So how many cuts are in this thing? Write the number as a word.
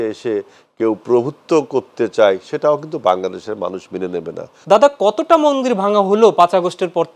one